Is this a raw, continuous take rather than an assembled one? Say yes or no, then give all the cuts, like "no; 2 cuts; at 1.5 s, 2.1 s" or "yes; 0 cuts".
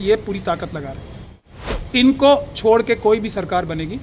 no; 1 cut; at 1.8 s